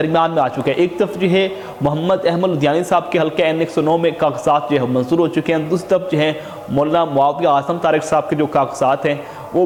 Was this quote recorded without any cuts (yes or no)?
yes